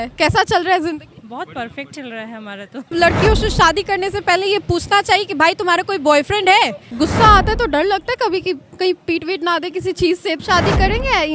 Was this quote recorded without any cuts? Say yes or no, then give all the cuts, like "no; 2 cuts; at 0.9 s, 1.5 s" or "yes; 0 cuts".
no; 3 cuts; at 2.9 s, 6.9 s, 10.4 s